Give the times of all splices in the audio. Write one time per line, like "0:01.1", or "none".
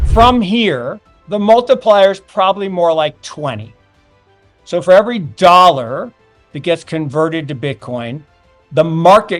none

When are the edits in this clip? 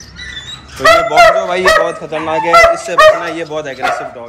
none

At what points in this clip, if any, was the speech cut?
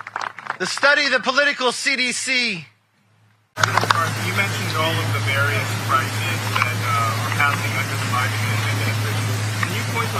0:03.5

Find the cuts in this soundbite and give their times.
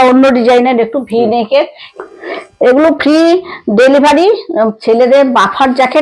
0:01.8
0:04.5

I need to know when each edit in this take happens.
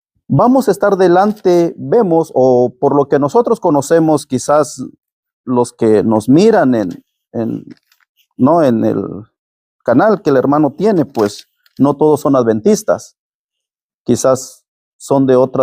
none

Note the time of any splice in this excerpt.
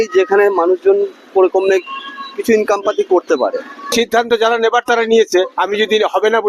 0:03.9

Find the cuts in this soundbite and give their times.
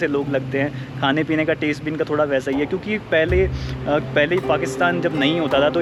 none

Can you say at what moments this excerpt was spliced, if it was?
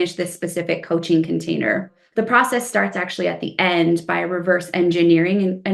0:02.0

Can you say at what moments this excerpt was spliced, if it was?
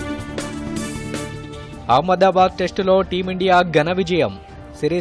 none

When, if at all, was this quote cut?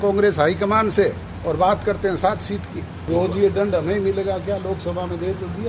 0:03.1

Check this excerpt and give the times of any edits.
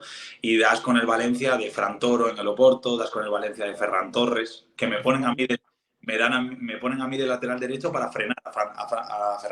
none

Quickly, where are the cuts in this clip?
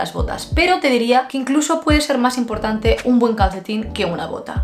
none

